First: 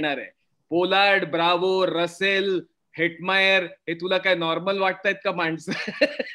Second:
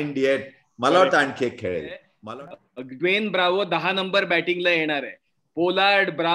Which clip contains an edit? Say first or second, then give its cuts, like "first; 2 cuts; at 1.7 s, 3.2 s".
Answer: second; 1 cut; at 2.1 s